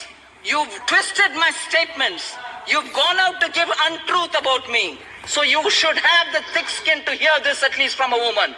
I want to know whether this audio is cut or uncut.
uncut